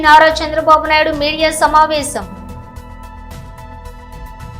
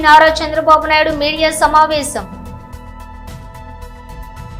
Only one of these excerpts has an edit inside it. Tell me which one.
first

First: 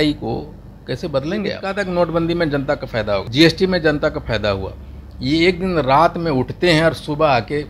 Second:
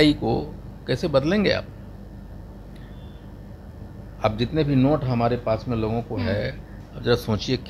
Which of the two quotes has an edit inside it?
first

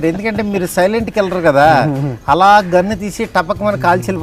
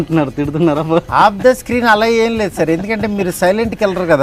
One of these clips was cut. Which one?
second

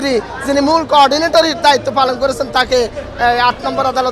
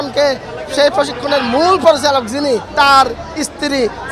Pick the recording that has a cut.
second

